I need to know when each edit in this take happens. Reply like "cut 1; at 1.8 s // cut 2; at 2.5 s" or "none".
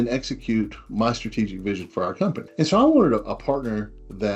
cut 1; at 2.4 s